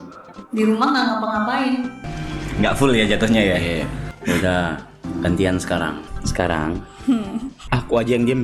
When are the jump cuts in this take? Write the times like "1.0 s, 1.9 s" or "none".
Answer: 2.0 s, 4.1 s, 5.0 s, 6.1 s, 7.6 s